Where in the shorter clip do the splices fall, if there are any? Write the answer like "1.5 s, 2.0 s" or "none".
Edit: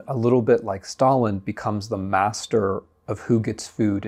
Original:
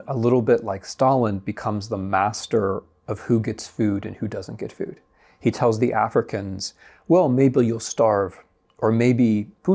none